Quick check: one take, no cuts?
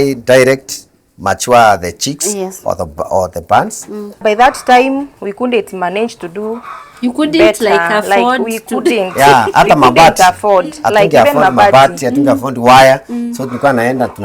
no; 1 cut; at 4.2 s

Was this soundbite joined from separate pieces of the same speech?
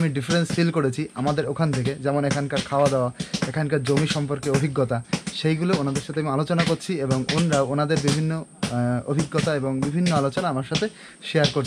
no; 0 cuts

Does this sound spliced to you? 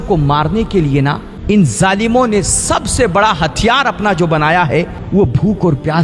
yes; 2 cuts; at 1.3 s, 5.0 s

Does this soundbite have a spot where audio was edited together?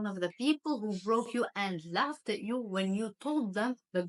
no; 0 cuts

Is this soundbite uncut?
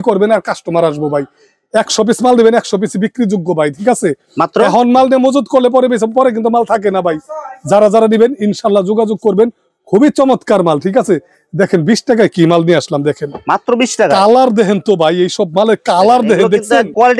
yes; 0 cuts

